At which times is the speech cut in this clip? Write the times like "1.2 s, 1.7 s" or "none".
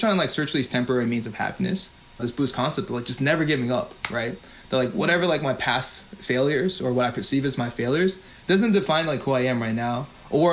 2.2 s